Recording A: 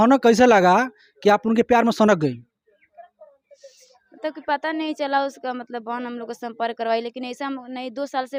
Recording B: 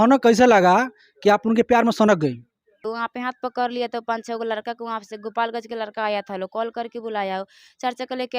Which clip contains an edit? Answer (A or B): B